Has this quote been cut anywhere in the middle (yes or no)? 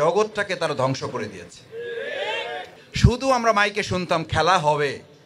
yes